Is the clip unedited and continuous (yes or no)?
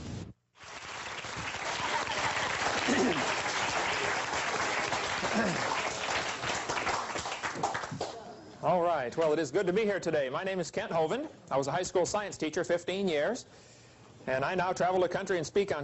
yes